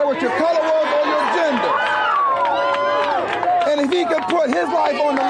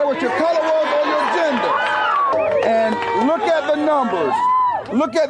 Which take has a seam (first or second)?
second